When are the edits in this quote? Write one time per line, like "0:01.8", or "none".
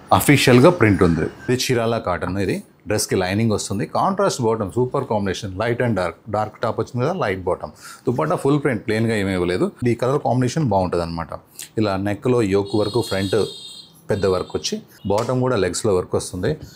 0:01.3
0:09.8
0:14.9